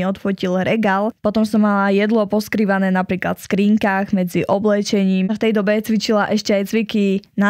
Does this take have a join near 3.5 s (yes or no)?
no